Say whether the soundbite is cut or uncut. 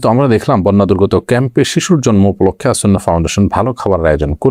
uncut